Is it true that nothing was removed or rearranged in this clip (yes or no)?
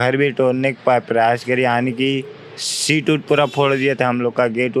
yes